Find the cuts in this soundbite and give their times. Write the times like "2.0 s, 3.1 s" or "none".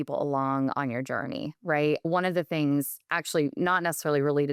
none